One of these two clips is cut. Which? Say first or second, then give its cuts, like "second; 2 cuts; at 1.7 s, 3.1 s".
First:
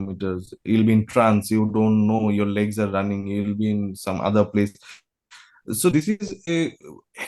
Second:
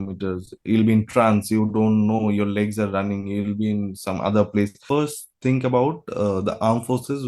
second; 1 cut; at 4.8 s